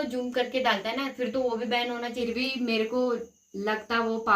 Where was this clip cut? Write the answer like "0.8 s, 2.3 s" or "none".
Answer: 2.2 s

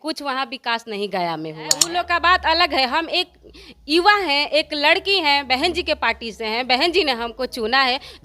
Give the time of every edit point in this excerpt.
1.8 s

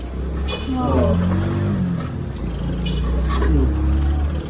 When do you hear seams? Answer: none

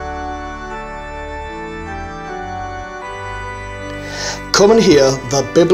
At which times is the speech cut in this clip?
4.5 s

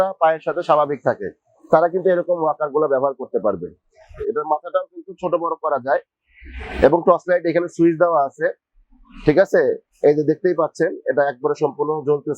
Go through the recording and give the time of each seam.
4.1 s

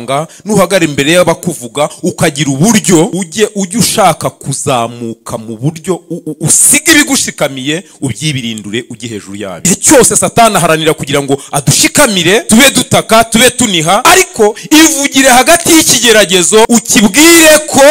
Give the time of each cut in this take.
3.1 s, 9.6 s, 12.4 s, 14.0 s, 16.7 s

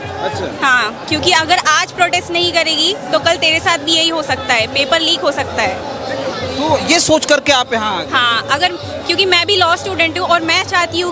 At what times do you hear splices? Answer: none

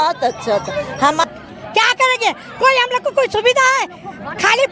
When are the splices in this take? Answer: 1.2 s

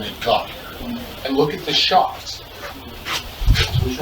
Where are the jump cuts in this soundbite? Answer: 1.1 s

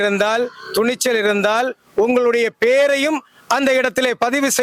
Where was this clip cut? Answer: none

